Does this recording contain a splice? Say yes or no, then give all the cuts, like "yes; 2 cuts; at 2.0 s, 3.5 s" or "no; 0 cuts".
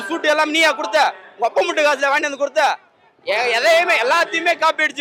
no; 0 cuts